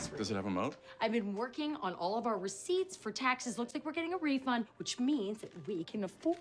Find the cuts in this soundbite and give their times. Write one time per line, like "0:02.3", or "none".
0:03.6